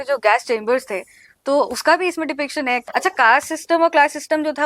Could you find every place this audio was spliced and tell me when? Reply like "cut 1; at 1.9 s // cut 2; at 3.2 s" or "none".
cut 1; at 2.8 s

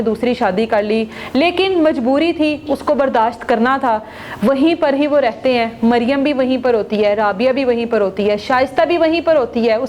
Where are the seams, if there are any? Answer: none

